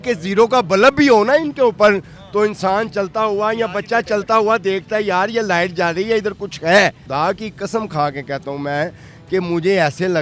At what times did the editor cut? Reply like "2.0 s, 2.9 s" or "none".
7.0 s